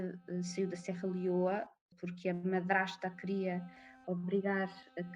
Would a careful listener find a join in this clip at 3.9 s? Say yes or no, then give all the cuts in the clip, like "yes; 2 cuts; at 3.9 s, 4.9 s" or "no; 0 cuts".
no; 1 cut; at 1.8 s